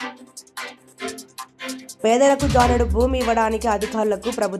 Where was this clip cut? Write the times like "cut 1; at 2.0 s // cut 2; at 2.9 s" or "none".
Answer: cut 1; at 1.9 s